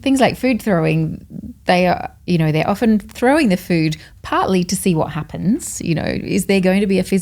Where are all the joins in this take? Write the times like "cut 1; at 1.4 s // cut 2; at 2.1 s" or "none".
none